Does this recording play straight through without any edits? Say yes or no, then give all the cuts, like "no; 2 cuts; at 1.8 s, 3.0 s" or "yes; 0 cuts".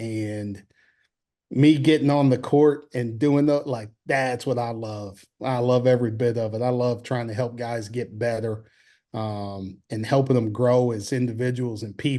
yes; 0 cuts